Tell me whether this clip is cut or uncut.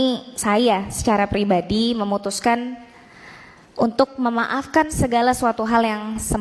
uncut